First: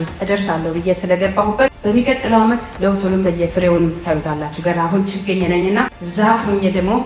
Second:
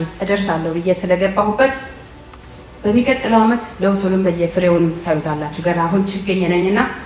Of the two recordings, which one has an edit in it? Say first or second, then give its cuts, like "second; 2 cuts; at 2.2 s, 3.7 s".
first; 2 cuts; at 1.8 s, 6.0 s